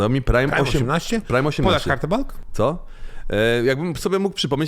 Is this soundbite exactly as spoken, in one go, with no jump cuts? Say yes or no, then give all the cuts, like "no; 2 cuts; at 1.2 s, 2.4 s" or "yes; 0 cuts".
yes; 0 cuts